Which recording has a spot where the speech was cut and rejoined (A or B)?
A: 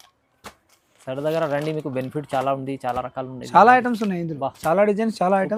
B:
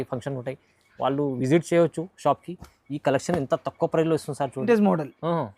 B